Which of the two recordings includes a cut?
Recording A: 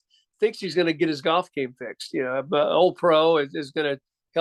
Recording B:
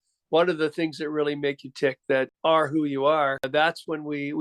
B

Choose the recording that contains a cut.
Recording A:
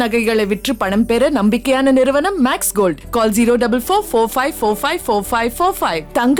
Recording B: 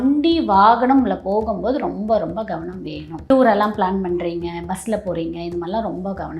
B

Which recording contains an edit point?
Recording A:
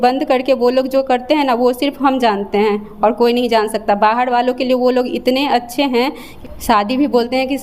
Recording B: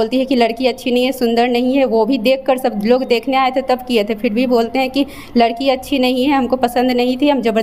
A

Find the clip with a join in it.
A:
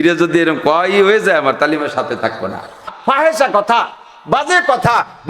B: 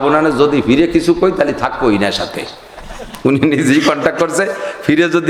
A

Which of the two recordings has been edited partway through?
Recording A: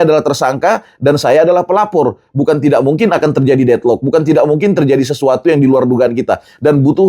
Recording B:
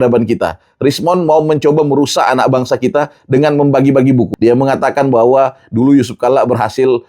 B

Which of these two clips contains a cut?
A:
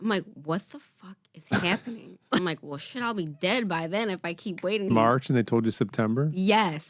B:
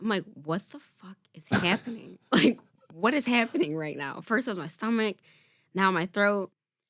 A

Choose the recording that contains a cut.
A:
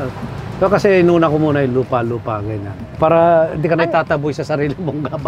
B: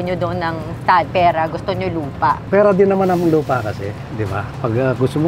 B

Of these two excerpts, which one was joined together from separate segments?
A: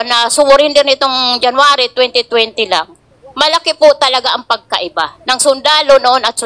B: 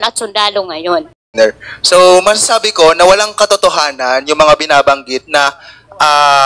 B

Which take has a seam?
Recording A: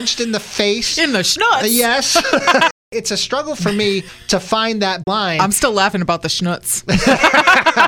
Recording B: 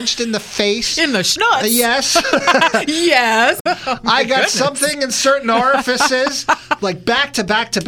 A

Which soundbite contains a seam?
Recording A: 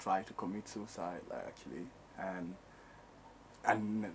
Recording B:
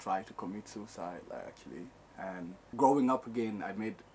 B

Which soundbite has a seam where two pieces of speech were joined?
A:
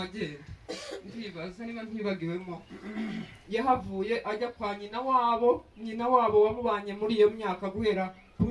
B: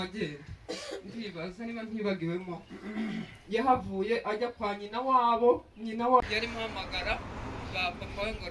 B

